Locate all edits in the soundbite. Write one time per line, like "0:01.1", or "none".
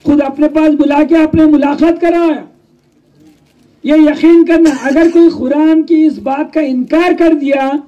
none